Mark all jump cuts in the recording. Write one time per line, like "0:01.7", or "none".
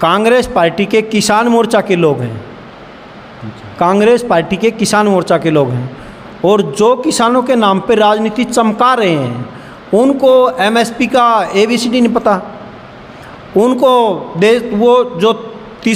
none

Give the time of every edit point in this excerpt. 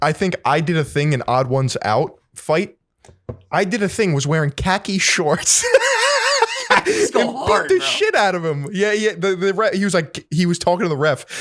none

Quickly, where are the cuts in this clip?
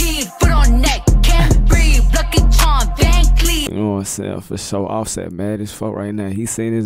0:03.6

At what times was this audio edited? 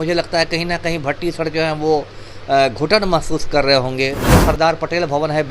0:04.3

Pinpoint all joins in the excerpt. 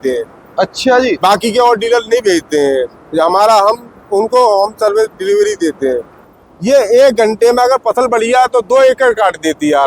0:06.1

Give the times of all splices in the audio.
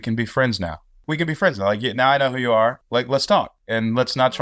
0:01.0
0:02.8
0:03.6

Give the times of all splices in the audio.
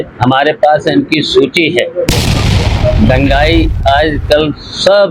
none

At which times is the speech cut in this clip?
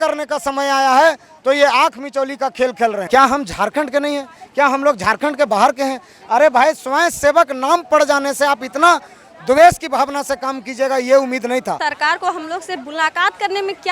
0:03.0
0:11.8

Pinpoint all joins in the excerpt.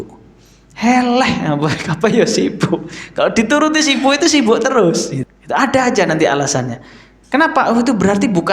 0:05.1

